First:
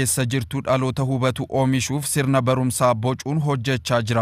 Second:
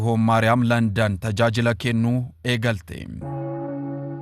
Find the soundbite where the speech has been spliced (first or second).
second